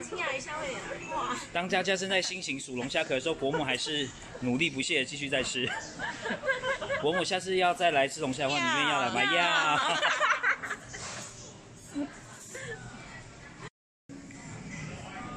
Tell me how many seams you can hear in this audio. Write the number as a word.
one